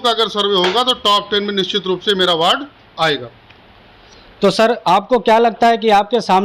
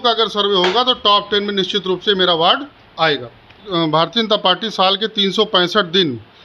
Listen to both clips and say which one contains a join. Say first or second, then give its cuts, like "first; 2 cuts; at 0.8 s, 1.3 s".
second; 1 cut; at 3.6 s